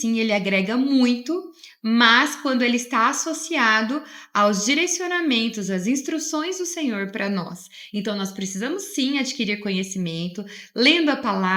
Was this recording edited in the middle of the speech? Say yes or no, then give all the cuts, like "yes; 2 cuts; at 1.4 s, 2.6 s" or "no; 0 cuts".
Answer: no; 0 cuts